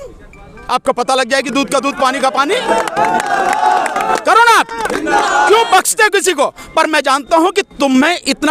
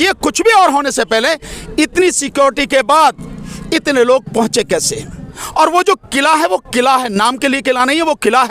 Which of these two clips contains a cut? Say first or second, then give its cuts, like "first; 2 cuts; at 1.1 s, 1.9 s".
second; 1 cut; at 5.4 s